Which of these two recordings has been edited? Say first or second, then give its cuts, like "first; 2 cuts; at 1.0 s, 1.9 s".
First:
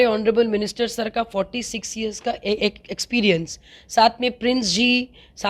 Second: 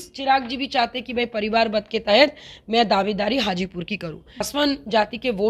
second; 1 cut; at 4.4 s